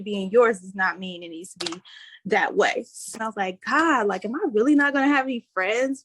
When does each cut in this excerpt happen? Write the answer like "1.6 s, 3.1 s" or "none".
3.1 s